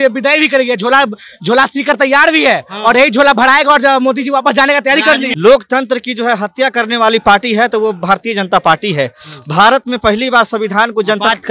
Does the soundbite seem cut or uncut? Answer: cut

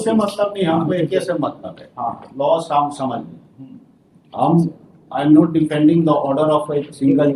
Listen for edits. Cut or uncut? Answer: uncut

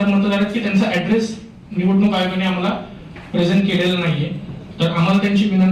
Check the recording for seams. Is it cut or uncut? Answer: uncut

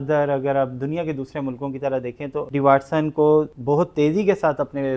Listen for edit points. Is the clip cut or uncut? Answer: cut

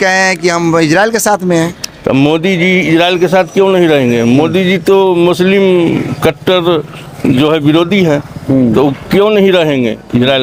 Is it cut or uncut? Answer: uncut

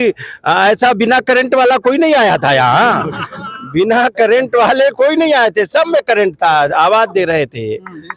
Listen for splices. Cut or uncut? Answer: uncut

